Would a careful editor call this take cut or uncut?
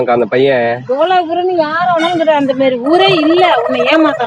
uncut